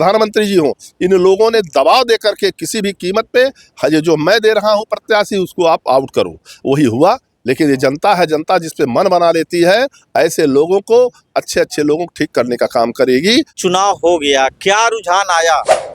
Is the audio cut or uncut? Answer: cut